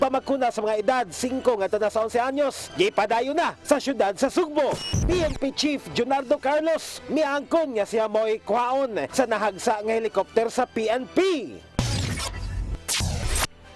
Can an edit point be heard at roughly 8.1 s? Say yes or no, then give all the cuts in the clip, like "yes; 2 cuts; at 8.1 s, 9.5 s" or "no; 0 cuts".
no; 2 cuts; at 4.9 s, 11.6 s